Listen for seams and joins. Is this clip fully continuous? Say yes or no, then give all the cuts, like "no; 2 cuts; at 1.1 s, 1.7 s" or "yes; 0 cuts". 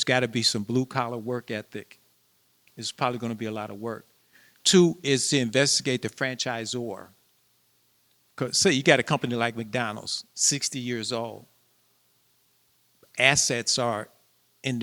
yes; 0 cuts